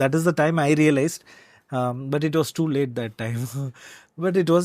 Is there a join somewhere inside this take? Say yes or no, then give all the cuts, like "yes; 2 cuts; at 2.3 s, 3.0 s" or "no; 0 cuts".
no; 0 cuts